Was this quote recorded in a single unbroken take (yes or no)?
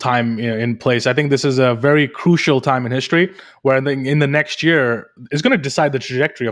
yes